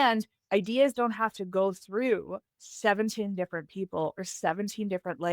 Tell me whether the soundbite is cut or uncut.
uncut